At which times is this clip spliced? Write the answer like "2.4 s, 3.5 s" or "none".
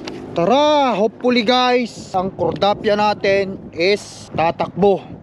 2.1 s, 4.2 s